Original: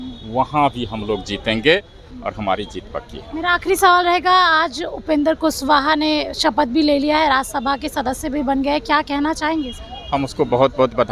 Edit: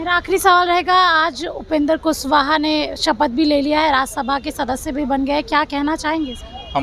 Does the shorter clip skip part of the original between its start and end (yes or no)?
no